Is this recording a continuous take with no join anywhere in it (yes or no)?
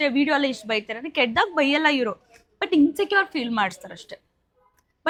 yes